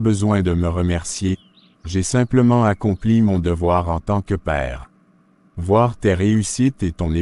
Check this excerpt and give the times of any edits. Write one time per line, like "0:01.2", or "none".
none